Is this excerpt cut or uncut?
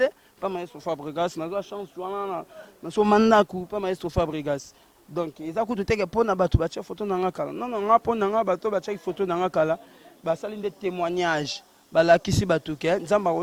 uncut